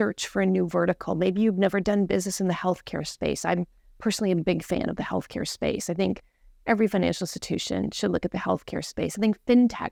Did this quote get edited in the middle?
no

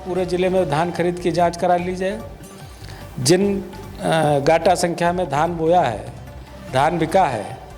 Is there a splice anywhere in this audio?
no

